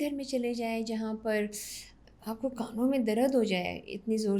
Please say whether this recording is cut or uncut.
uncut